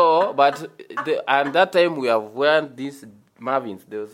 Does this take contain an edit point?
no; 0 cuts

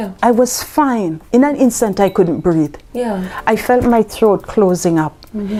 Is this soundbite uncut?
yes; 0 cuts

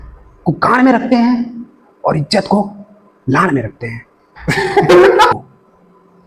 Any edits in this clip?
yes; 1 cut; at 5.3 s

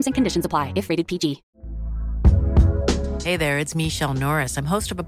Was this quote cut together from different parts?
yes; 1 cut; at 1.5 s

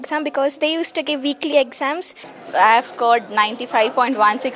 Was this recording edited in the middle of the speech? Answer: yes; 1 cut; at 2.3 s

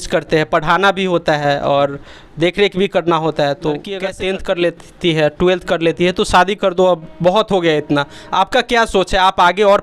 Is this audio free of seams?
no; 1 cut; at 4.0 s

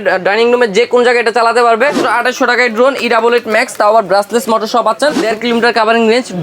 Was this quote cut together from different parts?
yes; 2 cuts; at 2.0 s, 5.2 s

